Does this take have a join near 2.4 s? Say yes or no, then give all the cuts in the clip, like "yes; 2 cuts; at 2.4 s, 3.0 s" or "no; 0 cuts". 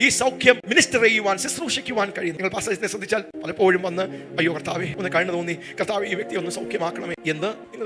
yes; 1 cut; at 2.4 s